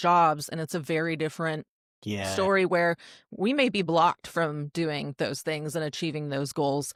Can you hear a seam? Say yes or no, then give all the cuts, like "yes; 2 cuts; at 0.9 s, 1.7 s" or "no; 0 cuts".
no; 0 cuts